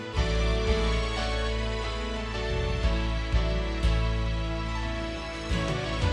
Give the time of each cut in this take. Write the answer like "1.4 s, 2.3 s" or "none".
none